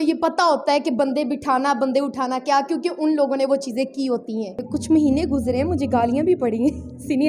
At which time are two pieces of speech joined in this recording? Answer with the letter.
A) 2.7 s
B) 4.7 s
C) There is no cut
B